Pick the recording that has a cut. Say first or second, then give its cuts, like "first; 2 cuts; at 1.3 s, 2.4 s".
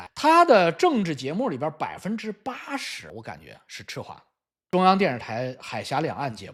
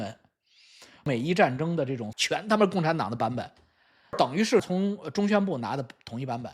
second; 2 cuts; at 1.1 s, 4.7 s